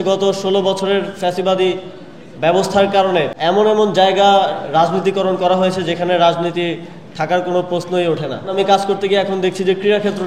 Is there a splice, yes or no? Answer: yes